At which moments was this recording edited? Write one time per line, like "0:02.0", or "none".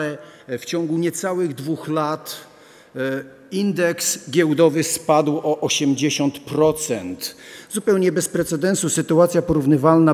none